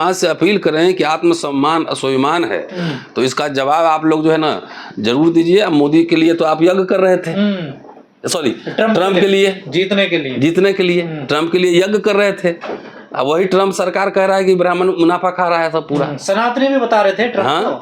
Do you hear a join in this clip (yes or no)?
no